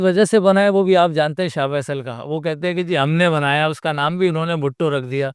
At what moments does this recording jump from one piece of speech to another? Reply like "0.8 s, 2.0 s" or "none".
none